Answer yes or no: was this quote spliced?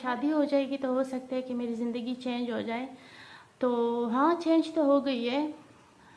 no